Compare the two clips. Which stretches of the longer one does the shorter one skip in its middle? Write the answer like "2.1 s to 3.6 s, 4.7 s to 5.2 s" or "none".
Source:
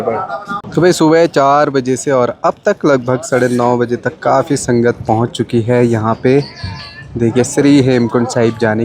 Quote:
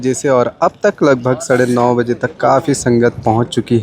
none